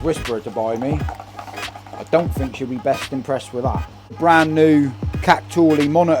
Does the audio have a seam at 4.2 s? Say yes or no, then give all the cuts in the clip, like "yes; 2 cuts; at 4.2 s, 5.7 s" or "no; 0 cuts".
yes; 1 cut; at 4.2 s